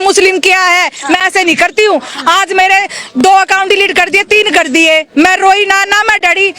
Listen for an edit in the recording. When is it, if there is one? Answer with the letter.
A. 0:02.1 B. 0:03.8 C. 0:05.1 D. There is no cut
D